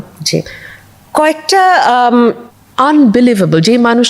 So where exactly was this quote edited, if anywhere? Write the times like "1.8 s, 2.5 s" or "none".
2.5 s